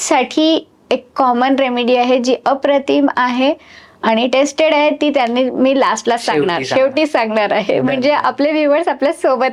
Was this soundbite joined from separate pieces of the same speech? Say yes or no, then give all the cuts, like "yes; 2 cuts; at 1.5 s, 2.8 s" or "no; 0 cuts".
no; 0 cuts